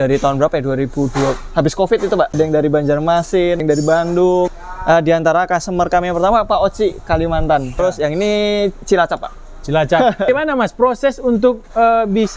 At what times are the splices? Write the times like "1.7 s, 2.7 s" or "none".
2.3 s, 3.6 s, 4.6 s, 7.8 s, 10.3 s